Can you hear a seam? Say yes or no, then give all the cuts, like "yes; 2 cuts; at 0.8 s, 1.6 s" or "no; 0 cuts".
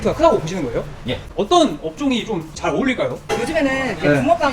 yes; 2 cuts; at 1.2 s, 3.2 s